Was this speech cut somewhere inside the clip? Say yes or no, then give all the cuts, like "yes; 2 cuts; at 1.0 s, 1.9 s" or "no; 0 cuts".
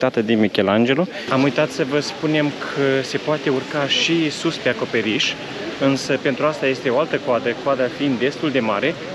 yes; 1 cut; at 1.2 s